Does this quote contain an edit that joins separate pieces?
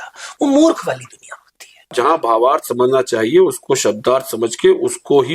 yes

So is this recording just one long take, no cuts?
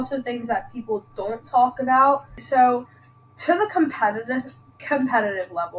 yes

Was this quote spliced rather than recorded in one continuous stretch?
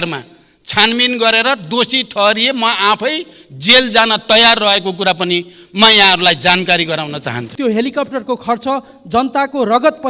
yes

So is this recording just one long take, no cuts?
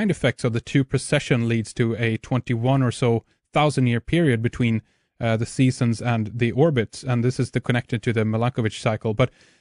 yes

